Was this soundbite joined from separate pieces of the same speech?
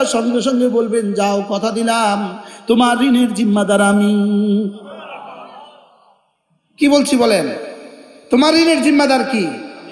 no; 0 cuts

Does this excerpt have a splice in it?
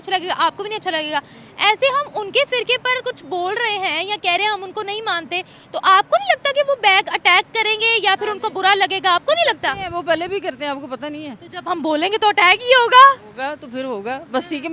no; 0 cuts

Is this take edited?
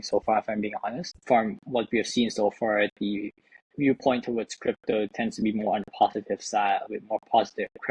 yes; 1 cut; at 1.1 s

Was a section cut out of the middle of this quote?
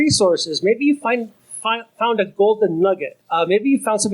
yes; 1 cut; at 3.2 s

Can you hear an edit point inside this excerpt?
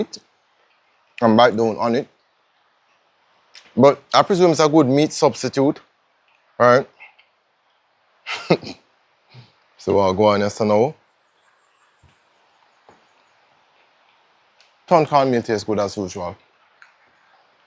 no; 0 cuts

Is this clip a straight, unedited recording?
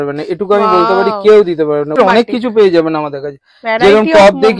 no; 1 cut; at 2.0 s

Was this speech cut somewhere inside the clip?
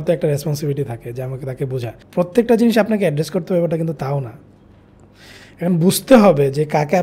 yes; 1 cut; at 2.0 s

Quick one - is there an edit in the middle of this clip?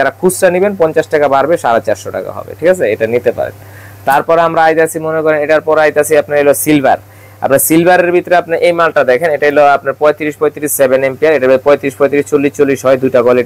no; 0 cuts

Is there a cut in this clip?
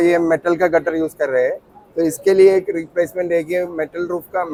no; 0 cuts

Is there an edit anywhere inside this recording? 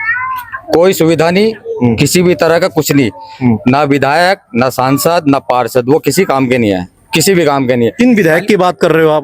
no; 0 cuts

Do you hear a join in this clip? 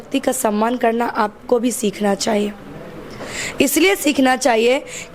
no; 0 cuts

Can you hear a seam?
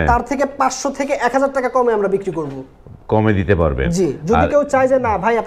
no; 0 cuts

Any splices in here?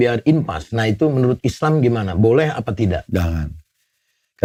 no; 0 cuts

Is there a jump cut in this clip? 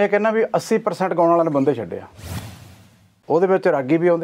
yes; 1 cut; at 2.6 s

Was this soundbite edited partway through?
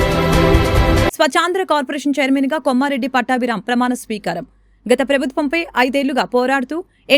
no; 0 cuts

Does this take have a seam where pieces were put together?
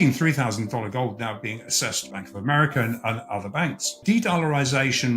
yes; 2 cuts; at 2.1 s, 3.9 s

